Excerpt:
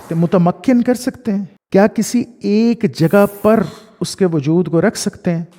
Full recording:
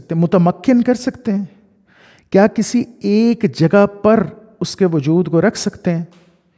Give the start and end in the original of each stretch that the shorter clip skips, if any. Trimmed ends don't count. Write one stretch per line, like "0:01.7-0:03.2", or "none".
0:01.5-0:02.1